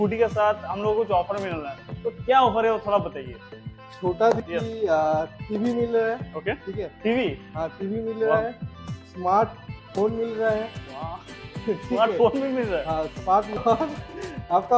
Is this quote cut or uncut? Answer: cut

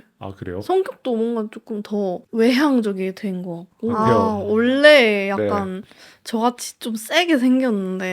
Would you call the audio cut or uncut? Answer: cut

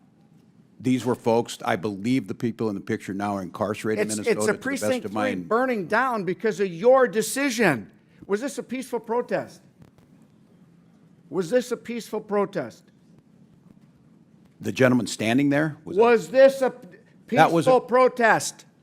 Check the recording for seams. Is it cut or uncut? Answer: cut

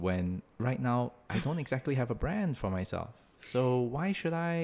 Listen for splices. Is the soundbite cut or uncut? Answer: cut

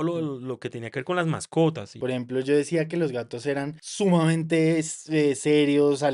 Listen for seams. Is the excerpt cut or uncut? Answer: cut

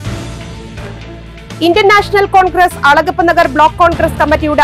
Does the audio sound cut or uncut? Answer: uncut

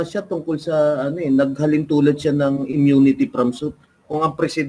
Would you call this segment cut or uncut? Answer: uncut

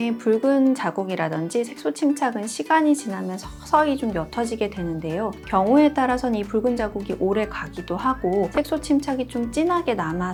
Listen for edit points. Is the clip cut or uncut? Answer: uncut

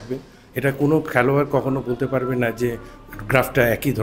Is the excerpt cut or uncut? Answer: uncut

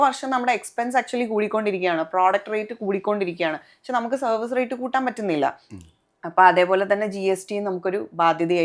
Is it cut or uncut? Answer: uncut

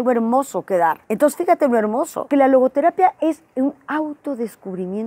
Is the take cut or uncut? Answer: cut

